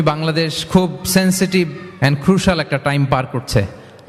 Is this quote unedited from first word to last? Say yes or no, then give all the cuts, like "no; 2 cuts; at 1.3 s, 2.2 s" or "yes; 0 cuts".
yes; 0 cuts